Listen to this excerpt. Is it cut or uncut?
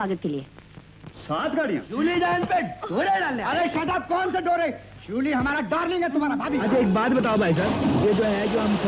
cut